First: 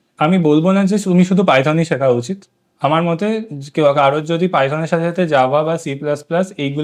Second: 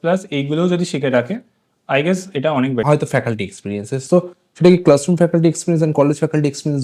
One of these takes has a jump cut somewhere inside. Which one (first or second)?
second